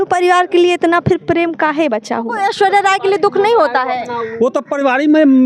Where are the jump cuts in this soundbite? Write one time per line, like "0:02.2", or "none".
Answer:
0:02.3